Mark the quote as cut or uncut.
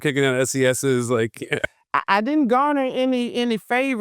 cut